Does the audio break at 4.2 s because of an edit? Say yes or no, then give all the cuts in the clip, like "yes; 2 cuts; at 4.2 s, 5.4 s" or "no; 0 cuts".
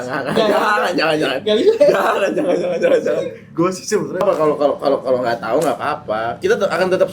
yes; 1 cut; at 4.2 s